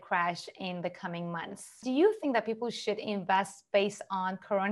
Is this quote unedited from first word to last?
no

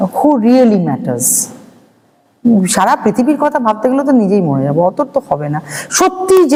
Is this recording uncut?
yes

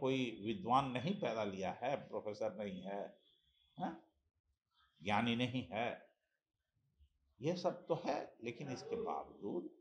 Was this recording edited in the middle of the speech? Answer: no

